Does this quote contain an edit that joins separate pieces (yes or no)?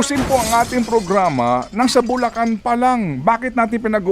no